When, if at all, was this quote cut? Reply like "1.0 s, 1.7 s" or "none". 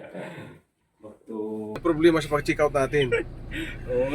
1.8 s